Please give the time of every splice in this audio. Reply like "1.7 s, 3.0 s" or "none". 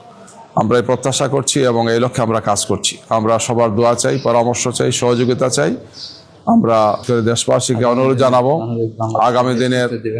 none